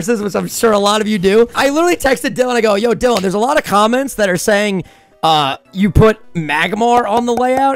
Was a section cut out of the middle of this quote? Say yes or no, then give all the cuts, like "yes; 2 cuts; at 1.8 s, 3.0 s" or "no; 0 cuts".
yes; 1 cut; at 1.5 s